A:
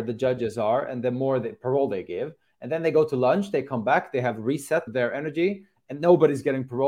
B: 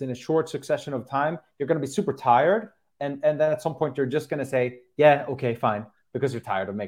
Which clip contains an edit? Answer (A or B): A